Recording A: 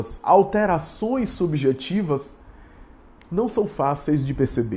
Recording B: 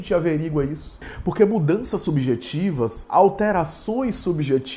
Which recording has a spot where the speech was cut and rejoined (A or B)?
B